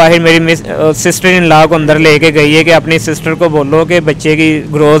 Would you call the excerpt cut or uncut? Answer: uncut